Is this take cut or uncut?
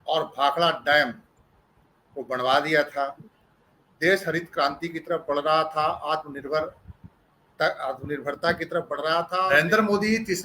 cut